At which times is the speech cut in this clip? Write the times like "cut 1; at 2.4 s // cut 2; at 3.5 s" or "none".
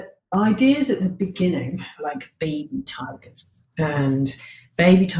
none